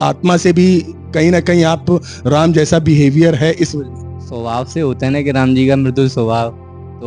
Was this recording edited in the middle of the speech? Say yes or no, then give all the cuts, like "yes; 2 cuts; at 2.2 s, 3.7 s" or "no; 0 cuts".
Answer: no; 0 cuts